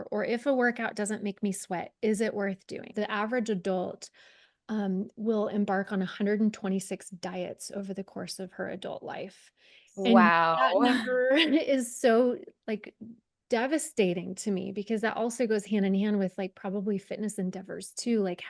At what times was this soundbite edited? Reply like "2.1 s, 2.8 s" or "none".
2.9 s